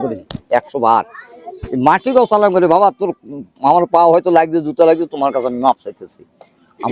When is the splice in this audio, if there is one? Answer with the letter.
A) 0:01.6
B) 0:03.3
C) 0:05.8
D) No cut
D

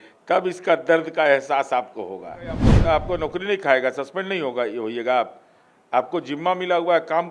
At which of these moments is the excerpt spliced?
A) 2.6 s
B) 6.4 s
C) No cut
A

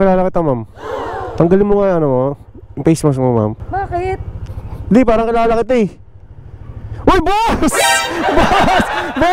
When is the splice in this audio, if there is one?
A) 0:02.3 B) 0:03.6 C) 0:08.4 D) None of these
B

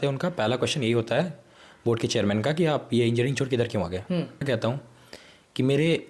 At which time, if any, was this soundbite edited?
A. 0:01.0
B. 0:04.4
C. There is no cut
B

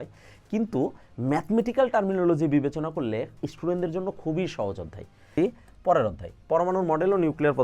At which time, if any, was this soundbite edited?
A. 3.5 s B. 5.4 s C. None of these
B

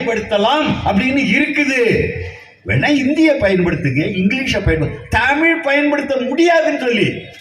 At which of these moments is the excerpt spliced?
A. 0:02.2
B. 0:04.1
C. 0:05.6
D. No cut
D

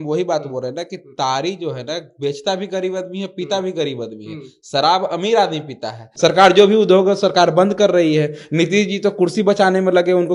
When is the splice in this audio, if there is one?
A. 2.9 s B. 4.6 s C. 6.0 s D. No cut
C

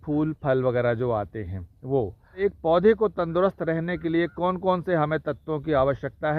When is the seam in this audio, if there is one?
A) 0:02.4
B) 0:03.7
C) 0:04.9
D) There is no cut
A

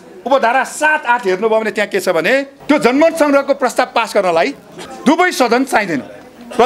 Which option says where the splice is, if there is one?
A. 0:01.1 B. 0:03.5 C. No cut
C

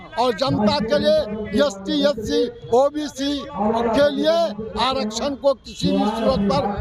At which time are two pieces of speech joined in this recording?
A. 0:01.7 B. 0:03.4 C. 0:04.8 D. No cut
D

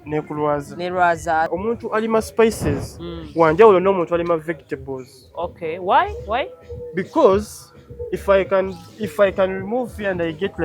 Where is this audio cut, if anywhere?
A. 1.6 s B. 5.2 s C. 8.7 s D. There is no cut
A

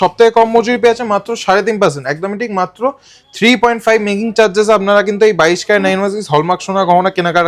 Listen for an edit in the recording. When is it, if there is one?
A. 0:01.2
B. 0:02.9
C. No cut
C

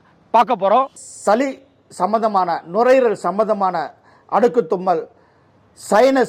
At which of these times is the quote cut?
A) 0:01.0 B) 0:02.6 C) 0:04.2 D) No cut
A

